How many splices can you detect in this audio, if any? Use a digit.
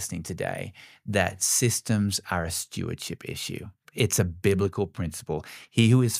1